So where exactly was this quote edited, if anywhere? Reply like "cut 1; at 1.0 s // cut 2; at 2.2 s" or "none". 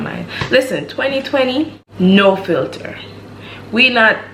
none

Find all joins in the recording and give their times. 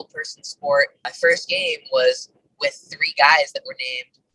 cut 1; at 1.0 s

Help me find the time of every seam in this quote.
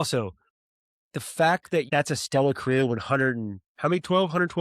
cut 1; at 1.9 s

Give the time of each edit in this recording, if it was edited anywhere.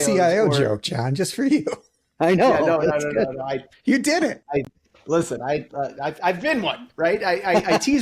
none

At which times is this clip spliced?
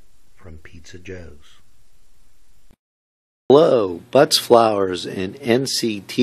none

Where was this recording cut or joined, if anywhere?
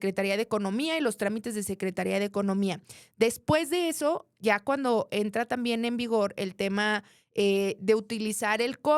none

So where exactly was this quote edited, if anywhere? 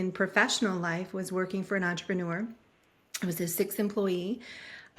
none

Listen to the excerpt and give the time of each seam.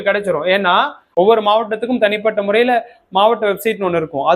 cut 1; at 1.0 s

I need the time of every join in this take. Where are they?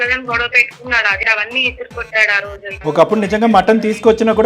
cut 1; at 1.2 s // cut 2; at 2.8 s

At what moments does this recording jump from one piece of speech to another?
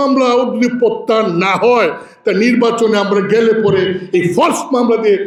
none

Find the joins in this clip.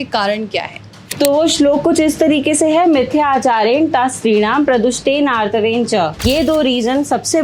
cut 1; at 1.1 s // cut 2; at 6.2 s

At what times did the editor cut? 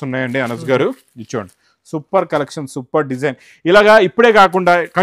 none

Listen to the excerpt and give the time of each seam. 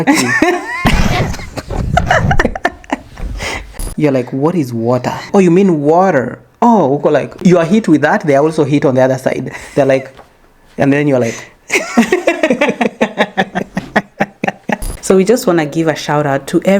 cut 1; at 3.8 s // cut 2; at 5.2 s // cut 3; at 7.4 s // cut 4; at 14.9 s

